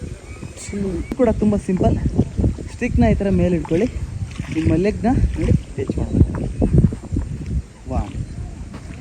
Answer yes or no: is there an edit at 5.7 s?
no